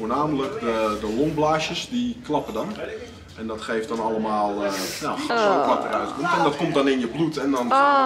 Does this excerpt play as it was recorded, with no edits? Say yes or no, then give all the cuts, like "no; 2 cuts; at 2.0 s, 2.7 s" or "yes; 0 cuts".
yes; 0 cuts